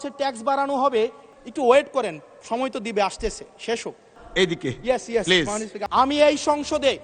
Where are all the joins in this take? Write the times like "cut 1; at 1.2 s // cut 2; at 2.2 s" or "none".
cut 1; at 1.2 s // cut 2; at 4.2 s // cut 3; at 5.8 s